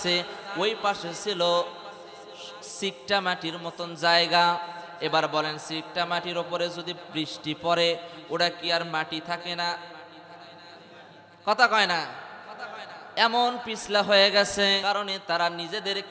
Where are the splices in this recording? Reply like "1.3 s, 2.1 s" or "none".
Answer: 14.8 s